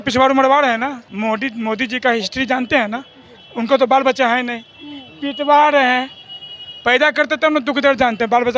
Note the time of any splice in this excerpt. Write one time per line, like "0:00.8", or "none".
0:01.0